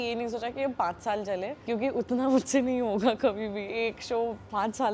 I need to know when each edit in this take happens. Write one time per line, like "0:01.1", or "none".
0:01.6

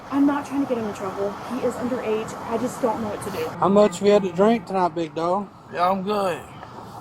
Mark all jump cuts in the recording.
0:03.5

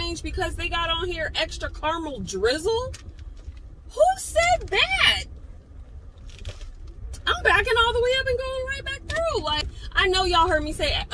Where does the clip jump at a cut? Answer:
0:09.8

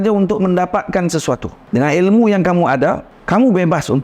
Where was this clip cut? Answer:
0:01.5
0:03.1

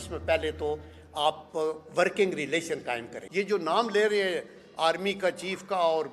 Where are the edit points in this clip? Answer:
0:03.2

